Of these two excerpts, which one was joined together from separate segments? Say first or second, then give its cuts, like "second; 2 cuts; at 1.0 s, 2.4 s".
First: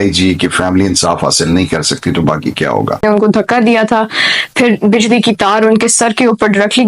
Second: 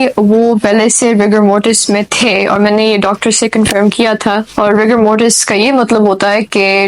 first; 1 cut; at 3.0 s